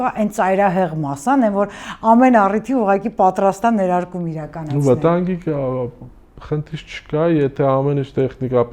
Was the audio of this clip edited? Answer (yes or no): no